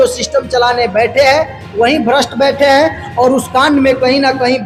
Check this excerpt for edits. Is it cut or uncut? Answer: uncut